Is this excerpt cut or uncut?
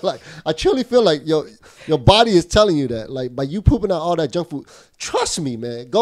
uncut